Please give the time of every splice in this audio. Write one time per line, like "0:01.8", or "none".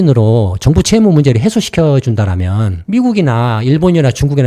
none

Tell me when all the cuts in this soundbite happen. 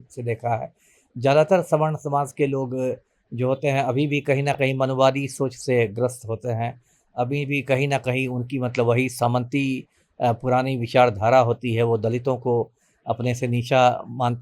none

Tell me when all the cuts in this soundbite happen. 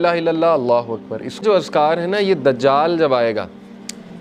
0:01.4

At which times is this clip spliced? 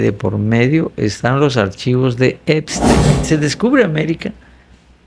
0:03.1

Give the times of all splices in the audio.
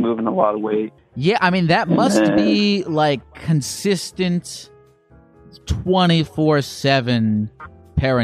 0:01.0

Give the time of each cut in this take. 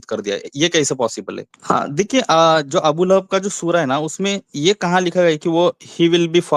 0:01.4

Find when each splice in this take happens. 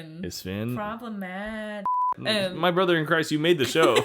0:02.1

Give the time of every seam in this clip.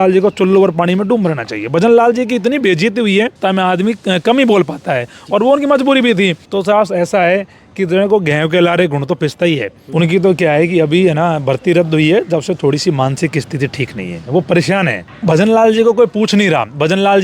0:03.4
0:06.4
0:09.8
0:15.1

